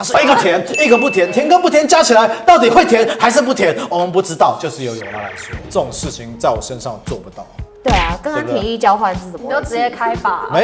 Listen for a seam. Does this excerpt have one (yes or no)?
yes